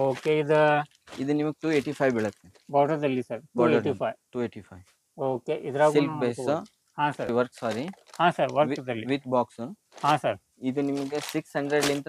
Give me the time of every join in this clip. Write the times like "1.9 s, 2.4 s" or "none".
7.3 s